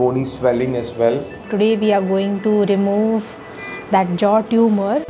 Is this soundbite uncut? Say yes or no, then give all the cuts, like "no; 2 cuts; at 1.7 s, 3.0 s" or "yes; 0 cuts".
no; 1 cut; at 1.5 s